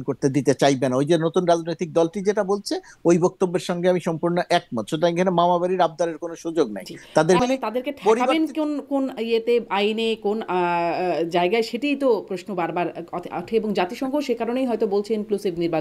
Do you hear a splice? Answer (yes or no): yes